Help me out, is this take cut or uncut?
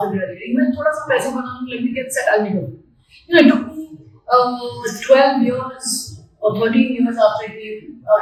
uncut